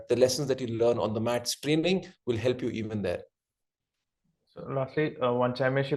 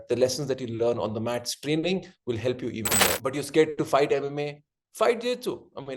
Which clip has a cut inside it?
second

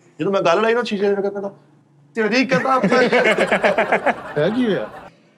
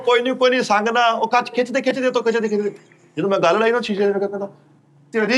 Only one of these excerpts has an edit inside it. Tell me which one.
first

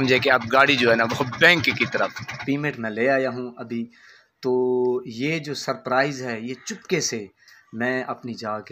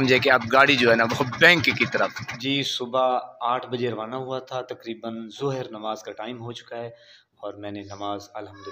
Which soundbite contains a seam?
first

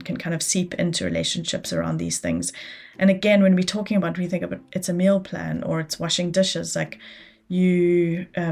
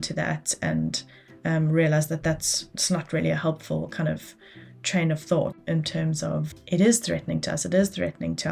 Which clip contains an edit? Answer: second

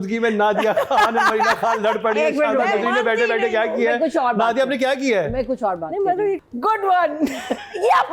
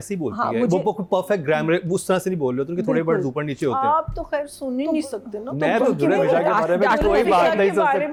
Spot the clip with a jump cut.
first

